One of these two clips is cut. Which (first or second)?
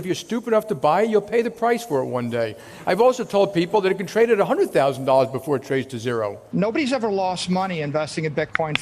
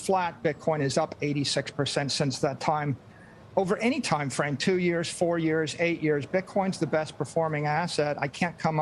first